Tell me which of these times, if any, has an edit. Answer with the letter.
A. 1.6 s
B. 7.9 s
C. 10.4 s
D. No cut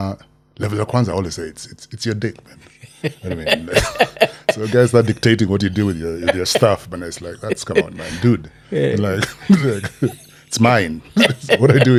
D